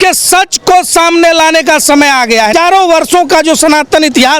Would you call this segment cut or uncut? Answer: cut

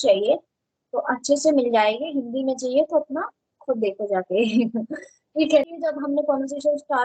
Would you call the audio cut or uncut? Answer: cut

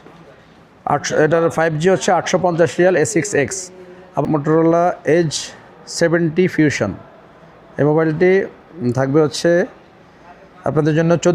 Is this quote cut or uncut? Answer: cut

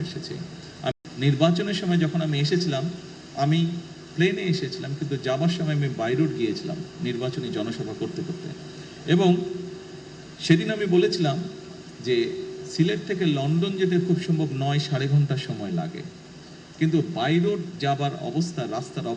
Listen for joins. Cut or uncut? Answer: cut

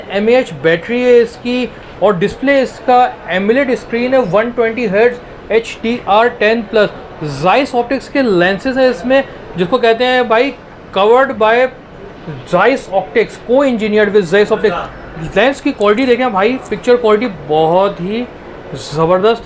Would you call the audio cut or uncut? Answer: uncut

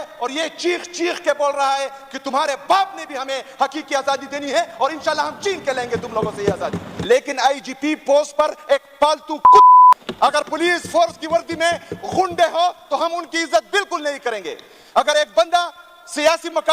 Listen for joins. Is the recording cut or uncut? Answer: cut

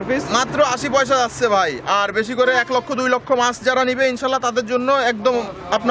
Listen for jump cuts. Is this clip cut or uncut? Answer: uncut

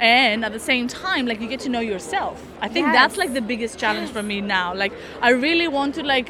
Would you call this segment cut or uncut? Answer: uncut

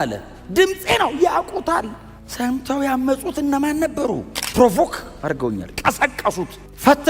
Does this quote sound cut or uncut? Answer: cut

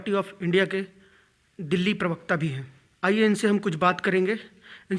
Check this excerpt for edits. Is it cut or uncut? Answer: uncut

